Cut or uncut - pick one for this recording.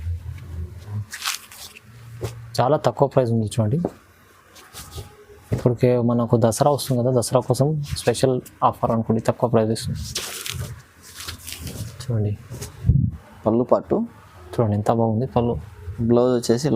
cut